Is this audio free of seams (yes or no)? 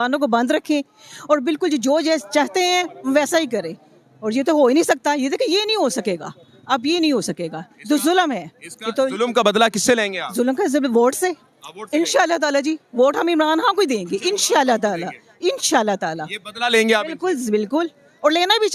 yes